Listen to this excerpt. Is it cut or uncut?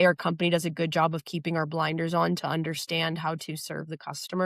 uncut